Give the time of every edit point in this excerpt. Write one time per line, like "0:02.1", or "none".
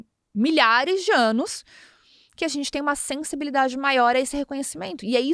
none